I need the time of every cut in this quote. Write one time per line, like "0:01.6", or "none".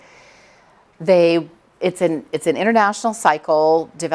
0:01.3